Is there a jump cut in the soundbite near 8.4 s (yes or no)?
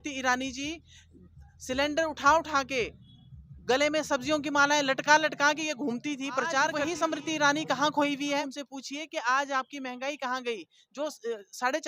yes